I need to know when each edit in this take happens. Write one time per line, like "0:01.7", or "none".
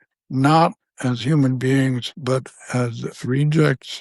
0:02.1